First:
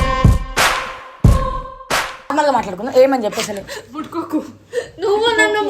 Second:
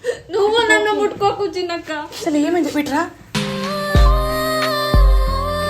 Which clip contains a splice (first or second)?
first